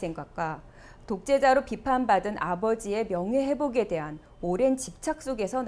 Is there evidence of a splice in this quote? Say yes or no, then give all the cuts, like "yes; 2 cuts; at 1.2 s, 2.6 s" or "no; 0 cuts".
no; 0 cuts